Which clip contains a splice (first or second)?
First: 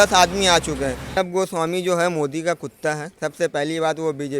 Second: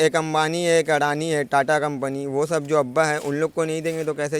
first